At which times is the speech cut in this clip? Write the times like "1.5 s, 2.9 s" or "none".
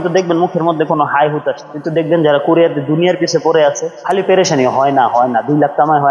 1.7 s, 3.9 s